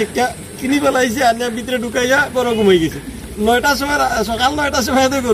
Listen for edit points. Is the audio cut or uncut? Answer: uncut